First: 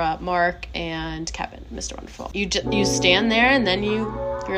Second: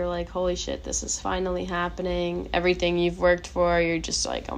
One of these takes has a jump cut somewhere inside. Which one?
first; 1 cut; at 2.3 s

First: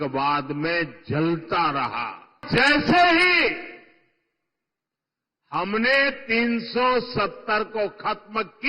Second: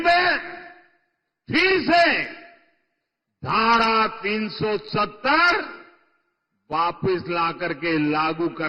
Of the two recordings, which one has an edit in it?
first; 1 cut; at 2.4 s

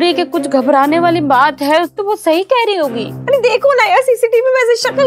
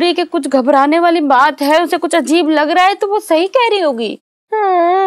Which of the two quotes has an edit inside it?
first; 2 cuts; at 1.9 s, 3.1 s

